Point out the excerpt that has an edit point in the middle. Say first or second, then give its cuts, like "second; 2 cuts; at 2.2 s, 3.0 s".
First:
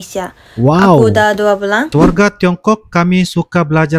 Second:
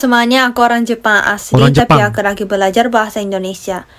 first; 1 cut; at 1.9 s